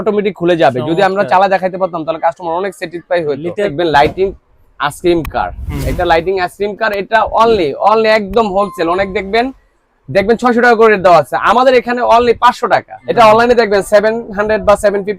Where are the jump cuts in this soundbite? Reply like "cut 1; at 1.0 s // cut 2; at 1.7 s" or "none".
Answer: cut 1; at 3.7 s // cut 2; at 13.0 s